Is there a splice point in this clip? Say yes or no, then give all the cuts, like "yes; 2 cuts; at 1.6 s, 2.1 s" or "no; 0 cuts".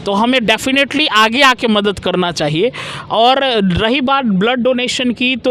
no; 0 cuts